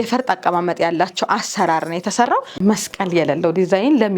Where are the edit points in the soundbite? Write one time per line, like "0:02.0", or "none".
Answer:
0:02.6